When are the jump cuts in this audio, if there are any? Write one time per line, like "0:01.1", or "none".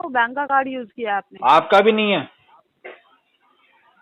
none